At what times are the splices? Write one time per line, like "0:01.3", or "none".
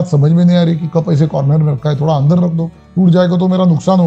0:02.8